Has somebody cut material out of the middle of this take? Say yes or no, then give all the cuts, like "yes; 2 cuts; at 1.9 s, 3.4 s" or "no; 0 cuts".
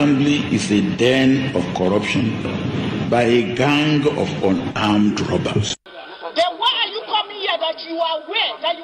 yes; 1 cut; at 5.8 s